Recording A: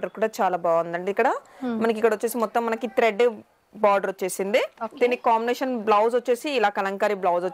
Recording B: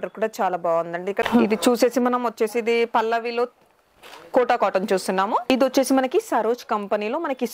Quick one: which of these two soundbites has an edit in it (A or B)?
B